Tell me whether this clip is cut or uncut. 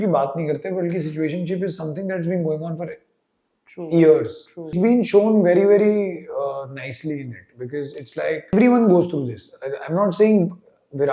cut